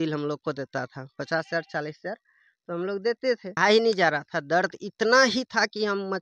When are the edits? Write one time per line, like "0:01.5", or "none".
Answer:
0:03.6